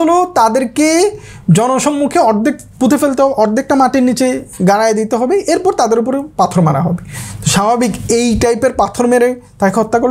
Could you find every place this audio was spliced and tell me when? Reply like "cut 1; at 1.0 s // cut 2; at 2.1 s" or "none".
none